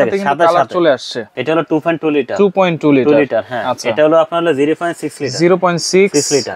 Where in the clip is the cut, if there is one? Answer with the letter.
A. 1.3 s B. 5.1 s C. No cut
A